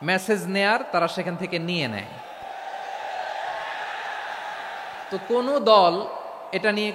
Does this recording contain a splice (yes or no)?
yes